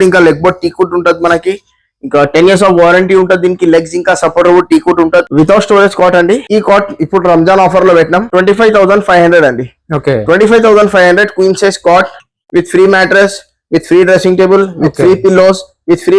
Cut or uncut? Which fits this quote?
uncut